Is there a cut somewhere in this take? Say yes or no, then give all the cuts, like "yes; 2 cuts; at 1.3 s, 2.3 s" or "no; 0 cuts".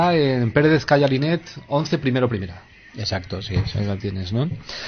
no; 0 cuts